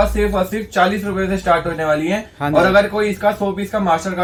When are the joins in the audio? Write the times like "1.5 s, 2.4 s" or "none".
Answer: none